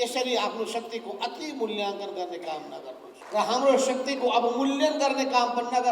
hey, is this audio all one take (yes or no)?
no